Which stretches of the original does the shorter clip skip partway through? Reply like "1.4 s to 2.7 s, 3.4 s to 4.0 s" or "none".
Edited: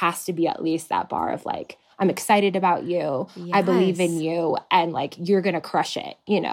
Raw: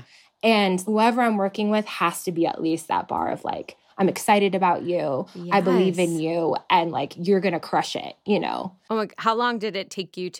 none

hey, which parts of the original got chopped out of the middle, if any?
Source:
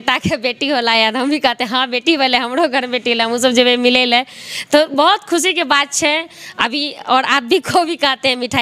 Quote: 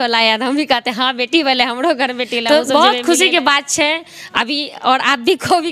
3.1 s to 4.6 s

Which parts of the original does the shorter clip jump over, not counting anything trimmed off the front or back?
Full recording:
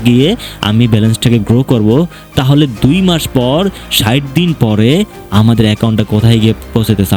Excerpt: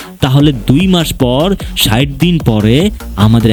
none

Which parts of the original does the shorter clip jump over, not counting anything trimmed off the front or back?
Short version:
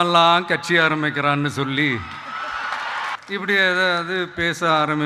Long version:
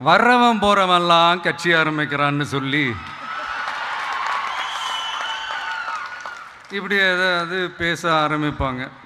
4.1 s to 6.6 s

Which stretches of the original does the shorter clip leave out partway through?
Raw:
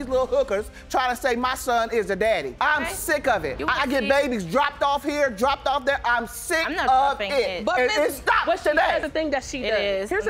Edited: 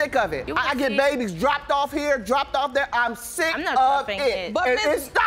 none

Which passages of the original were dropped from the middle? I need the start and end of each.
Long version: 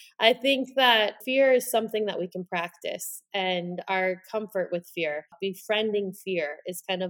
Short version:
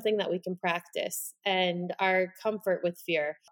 none

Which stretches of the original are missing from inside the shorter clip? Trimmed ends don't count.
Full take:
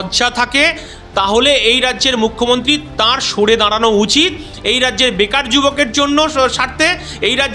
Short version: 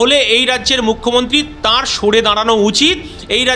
none

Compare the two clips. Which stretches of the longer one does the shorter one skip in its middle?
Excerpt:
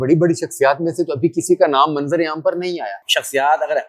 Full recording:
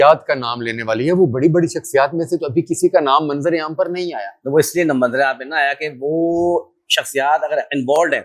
4.3 s to 6.8 s

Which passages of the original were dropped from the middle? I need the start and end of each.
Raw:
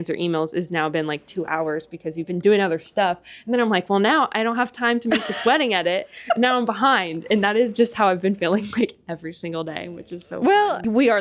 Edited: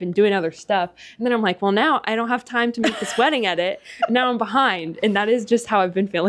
none

